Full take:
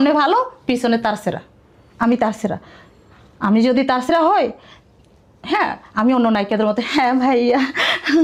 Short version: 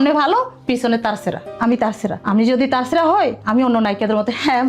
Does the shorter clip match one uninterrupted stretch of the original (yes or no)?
no